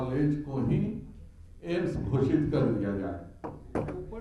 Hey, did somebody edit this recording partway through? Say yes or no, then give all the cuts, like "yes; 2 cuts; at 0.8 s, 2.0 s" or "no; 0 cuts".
no; 0 cuts